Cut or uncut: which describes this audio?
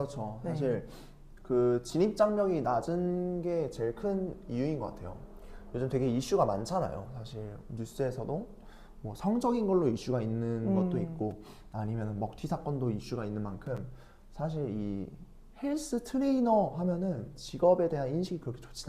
uncut